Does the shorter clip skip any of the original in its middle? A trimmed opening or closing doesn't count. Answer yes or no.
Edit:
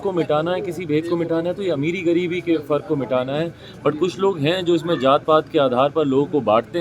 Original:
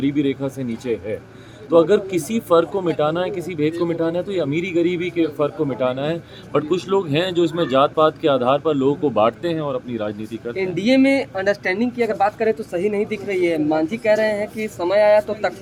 no